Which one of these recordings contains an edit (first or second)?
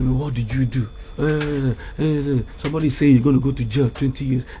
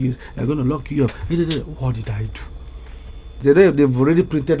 second